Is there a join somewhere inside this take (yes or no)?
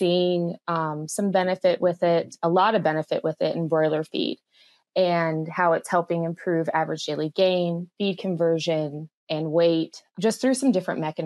yes